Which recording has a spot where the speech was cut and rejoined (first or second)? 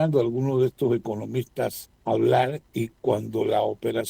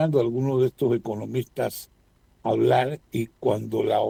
first